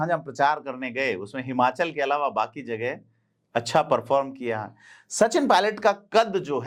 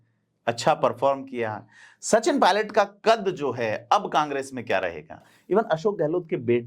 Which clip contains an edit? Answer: second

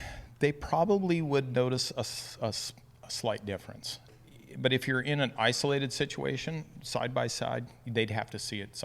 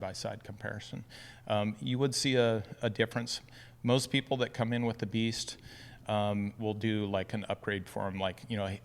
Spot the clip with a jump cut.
first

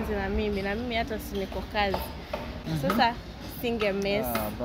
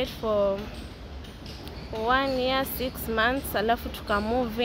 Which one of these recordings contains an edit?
first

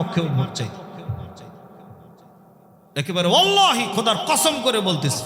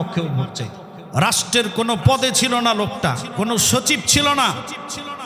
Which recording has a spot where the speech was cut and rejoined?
second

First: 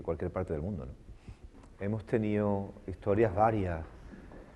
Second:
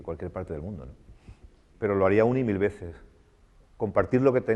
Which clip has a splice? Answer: second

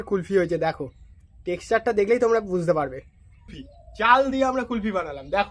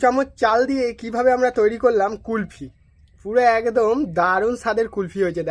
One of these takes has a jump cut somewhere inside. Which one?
first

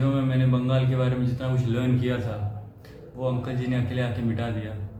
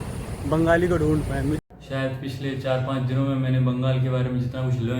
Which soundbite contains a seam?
second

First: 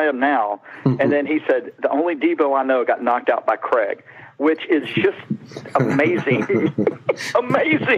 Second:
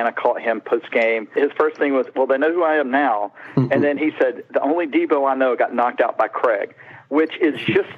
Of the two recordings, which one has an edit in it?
second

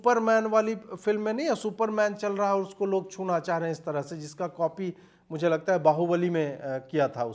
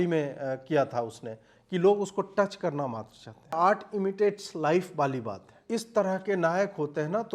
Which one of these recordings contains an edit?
second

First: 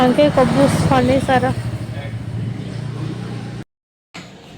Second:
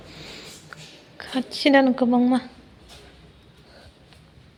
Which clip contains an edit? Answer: first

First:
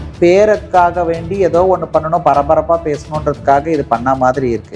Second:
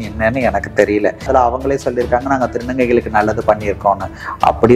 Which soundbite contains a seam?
second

